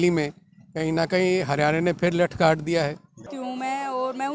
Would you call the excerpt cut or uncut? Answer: cut